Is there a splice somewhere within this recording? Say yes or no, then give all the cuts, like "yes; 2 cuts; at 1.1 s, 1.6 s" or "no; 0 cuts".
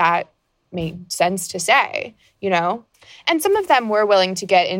yes; 1 cut; at 2.9 s